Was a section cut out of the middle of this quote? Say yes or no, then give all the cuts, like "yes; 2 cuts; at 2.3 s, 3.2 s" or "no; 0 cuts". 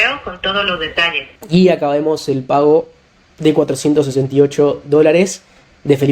yes; 1 cut; at 1.3 s